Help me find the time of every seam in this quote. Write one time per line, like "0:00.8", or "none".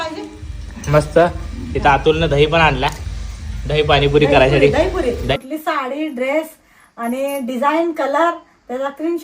0:05.3